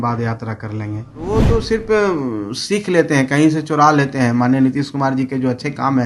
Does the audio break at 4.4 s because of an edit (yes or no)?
no